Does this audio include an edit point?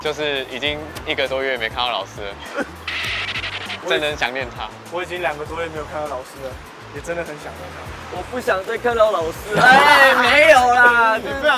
no; 0 cuts

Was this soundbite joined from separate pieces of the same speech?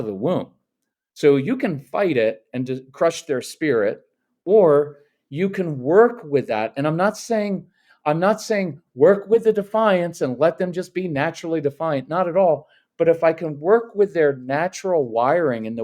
no; 0 cuts

